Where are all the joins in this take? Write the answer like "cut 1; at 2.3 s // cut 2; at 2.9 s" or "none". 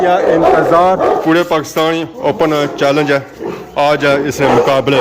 cut 1; at 1.2 s